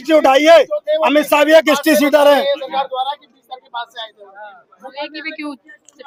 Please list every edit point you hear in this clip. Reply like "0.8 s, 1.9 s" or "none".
none